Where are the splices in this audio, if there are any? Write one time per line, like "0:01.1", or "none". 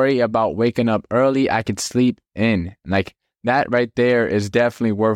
none